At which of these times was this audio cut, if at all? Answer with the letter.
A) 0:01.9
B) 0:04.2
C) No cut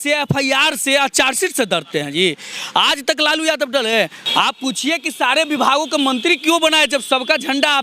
B